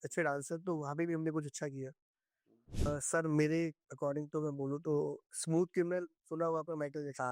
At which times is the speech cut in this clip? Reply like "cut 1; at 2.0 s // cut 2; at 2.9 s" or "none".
cut 1; at 2.9 s